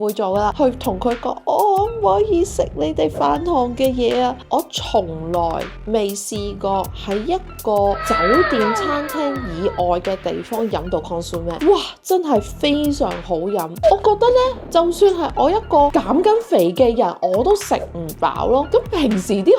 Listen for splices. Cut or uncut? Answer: cut